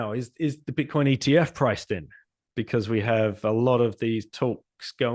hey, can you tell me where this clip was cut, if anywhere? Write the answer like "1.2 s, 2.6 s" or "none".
none